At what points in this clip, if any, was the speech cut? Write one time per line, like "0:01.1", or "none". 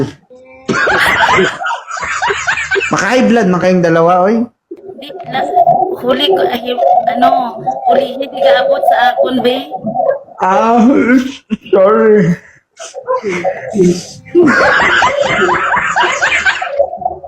0:04.7